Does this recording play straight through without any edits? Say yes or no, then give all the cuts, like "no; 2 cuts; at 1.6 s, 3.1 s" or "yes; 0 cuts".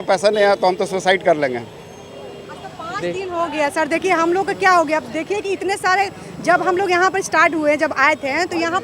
yes; 0 cuts